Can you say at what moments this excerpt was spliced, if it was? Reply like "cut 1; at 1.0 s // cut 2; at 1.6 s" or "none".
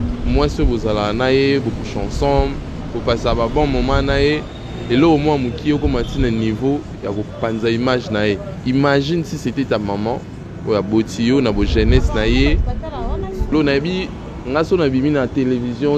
cut 1; at 13.5 s